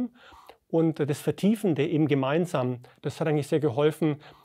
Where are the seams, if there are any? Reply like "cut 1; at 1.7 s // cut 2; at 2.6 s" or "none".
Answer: cut 1; at 3.0 s